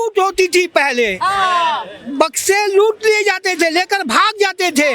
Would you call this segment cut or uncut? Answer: uncut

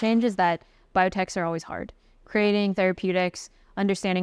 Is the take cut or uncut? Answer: uncut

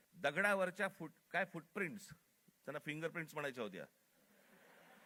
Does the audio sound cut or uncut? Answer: uncut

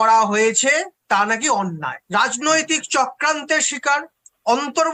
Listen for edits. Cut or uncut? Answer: uncut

